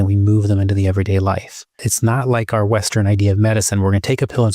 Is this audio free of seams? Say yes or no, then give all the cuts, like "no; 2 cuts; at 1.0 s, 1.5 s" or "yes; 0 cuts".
no; 1 cut; at 1.9 s